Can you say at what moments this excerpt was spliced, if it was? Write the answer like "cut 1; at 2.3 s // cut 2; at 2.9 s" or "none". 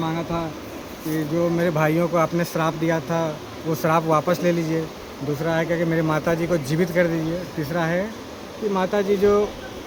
none